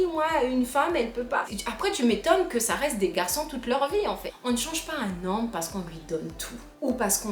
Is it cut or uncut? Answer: cut